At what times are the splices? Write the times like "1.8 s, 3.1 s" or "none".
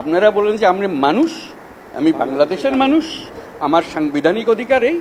none